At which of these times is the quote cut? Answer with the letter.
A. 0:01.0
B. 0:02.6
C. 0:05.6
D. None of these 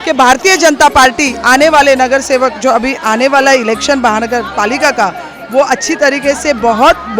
D